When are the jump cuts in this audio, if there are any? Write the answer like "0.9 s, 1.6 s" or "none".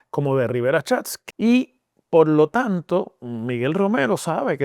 1.1 s